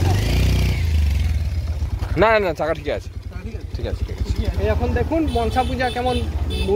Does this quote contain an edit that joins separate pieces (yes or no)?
yes